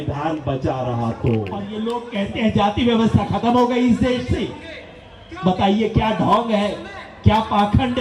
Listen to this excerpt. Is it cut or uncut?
cut